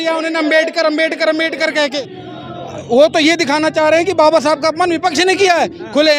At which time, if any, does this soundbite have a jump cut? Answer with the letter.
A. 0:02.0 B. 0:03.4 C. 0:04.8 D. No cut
A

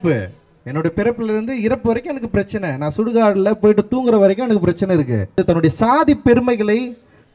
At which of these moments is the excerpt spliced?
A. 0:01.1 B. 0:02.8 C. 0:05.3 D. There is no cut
C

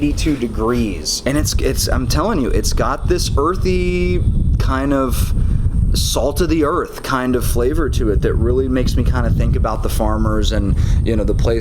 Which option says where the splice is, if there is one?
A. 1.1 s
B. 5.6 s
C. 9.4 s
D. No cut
A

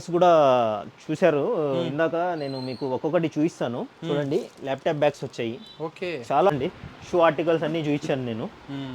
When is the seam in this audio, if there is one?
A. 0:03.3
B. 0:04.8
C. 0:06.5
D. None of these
C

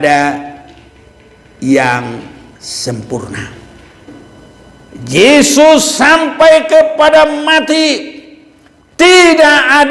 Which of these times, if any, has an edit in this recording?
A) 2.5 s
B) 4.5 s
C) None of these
B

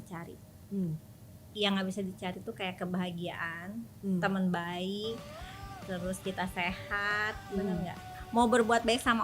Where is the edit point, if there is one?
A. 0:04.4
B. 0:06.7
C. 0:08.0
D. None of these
C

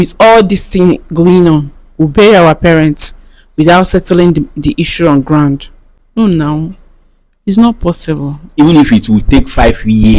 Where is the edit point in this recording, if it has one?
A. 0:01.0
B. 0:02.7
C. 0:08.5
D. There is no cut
C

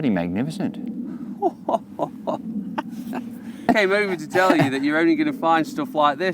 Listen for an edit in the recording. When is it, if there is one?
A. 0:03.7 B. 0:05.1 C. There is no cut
A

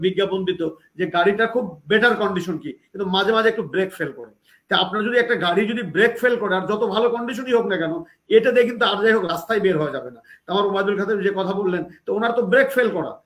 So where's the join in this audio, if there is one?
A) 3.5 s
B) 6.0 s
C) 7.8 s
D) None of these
D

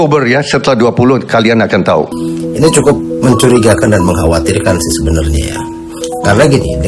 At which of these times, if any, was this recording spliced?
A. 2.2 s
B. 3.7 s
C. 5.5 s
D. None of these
A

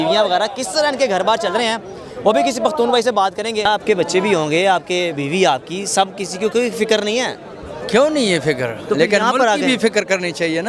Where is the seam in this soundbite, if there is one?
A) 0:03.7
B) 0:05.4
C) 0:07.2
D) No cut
A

